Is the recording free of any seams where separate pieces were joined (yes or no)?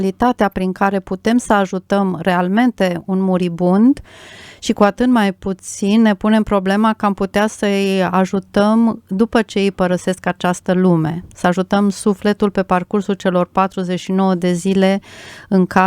yes